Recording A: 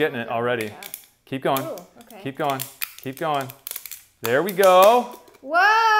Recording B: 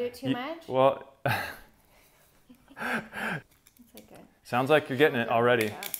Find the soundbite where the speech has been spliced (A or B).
B